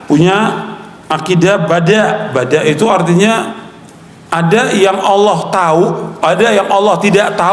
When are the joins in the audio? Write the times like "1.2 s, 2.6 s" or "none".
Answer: none